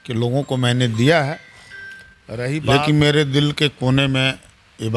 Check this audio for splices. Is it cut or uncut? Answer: cut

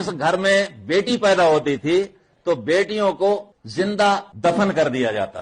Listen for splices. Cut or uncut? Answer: cut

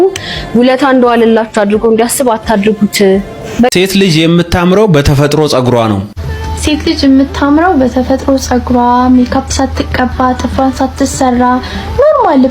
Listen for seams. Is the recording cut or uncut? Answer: cut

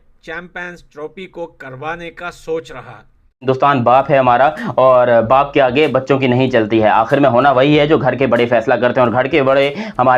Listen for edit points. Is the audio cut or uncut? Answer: cut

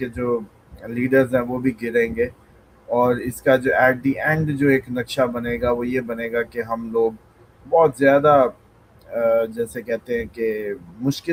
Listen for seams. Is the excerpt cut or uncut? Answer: uncut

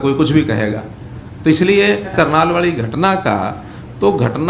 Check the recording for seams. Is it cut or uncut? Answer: cut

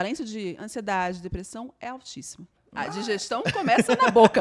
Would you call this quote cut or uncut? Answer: cut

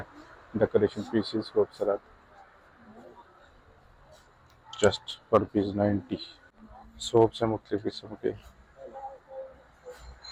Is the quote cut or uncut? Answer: uncut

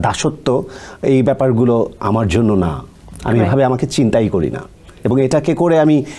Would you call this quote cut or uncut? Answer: uncut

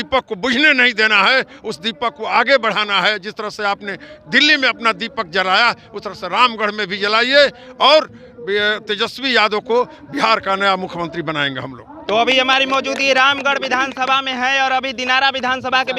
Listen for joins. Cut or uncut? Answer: uncut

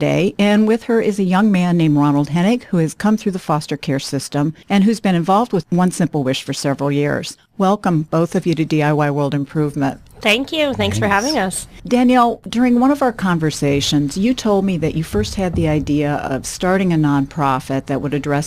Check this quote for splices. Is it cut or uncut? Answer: cut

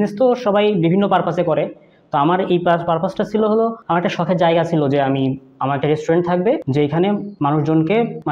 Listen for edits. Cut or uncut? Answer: uncut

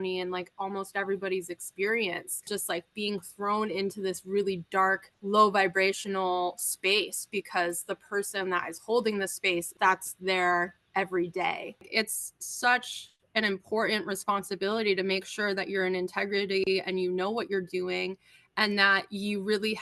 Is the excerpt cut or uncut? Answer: cut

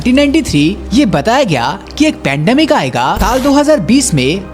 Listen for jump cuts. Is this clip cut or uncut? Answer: cut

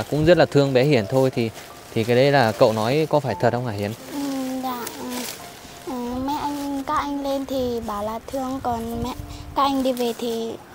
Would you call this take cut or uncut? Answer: uncut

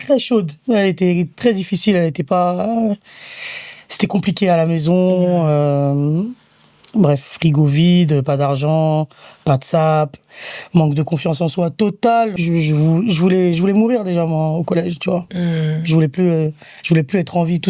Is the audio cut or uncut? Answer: cut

